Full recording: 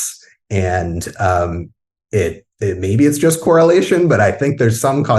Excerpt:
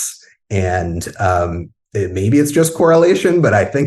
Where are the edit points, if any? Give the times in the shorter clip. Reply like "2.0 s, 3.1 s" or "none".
1.8 s